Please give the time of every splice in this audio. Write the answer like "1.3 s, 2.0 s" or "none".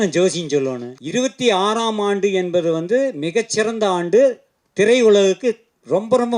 0.9 s

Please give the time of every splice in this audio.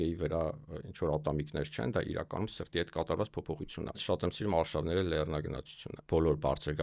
4.0 s, 5.9 s

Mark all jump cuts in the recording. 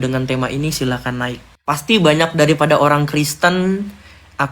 1.5 s

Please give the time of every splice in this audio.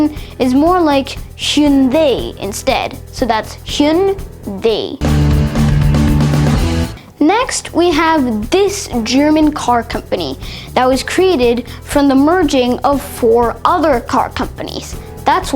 4.9 s, 7.0 s

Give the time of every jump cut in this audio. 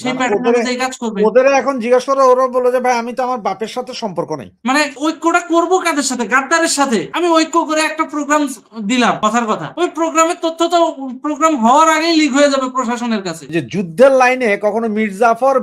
4.6 s, 13.4 s

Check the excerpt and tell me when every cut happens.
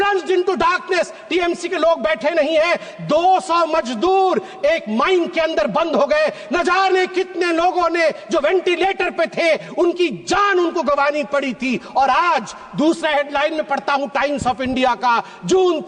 none

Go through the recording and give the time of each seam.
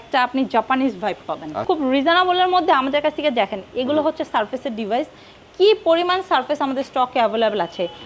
1.6 s

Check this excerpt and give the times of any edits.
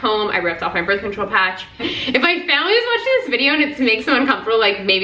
1.8 s

